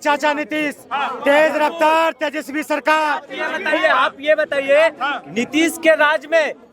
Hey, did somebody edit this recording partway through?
yes; 1 cut; at 3.3 s

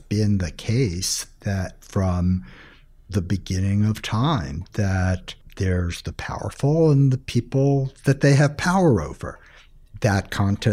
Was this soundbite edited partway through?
yes; 1 cut; at 5.4 s

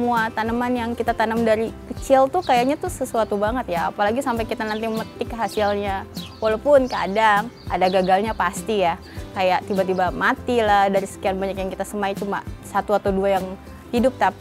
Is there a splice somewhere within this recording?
no; 0 cuts

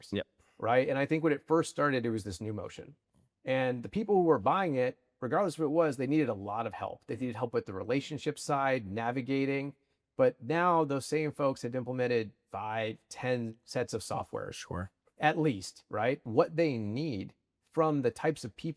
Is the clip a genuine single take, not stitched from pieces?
no; 1 cut; at 16.2 s

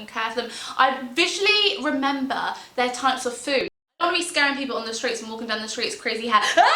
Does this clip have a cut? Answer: yes; 1 cut; at 4.0 s

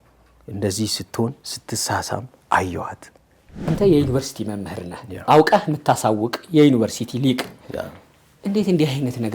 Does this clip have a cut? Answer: yes; 1 cut; at 3.7 s

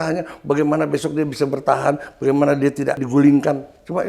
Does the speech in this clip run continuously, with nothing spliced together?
no; 1 cut; at 3.0 s

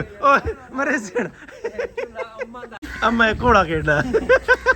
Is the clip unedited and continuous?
no; 1 cut; at 2.8 s

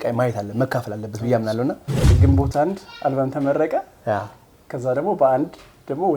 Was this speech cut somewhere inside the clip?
yes; 1 cut; at 2.2 s

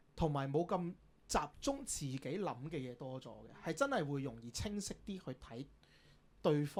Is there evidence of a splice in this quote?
no; 0 cuts

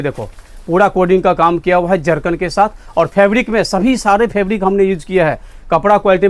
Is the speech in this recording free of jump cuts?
yes; 0 cuts

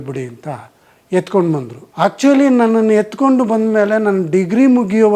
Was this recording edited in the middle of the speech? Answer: yes; 1 cut; at 1.8 s

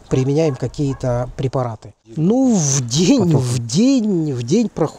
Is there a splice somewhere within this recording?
yes; 1 cut; at 2.2 s

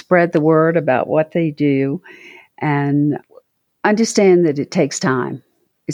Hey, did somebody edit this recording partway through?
yes; 1 cut; at 3.2 s

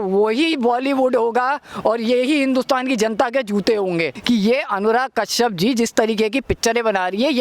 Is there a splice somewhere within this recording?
yes; 1 cut; at 4.2 s

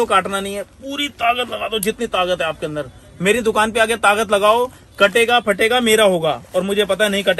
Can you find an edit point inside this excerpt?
no; 0 cuts

